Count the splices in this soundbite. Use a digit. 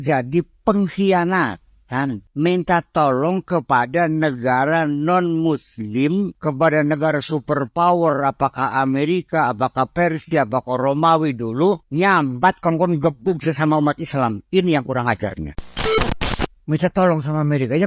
4